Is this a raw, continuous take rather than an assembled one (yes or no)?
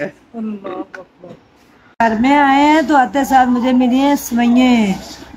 no